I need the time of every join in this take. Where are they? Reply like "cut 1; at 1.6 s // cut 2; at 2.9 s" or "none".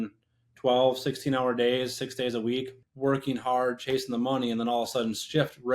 cut 1; at 2.8 s